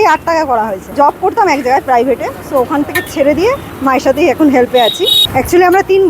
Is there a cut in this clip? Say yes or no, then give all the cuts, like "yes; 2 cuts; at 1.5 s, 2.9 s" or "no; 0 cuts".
yes; 3 cuts; at 0.9 s, 3.7 s, 5.2 s